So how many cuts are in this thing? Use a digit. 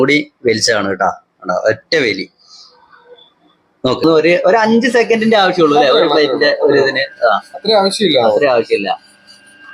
1